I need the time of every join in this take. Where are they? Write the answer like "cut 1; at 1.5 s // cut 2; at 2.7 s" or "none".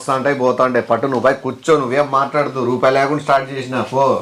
none